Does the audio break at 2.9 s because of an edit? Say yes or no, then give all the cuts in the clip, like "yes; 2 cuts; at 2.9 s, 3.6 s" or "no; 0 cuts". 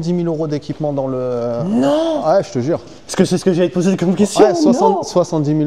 no; 0 cuts